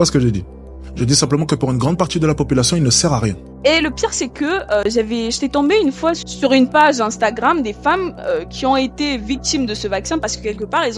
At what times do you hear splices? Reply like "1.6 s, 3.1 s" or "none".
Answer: 3.4 s, 6.3 s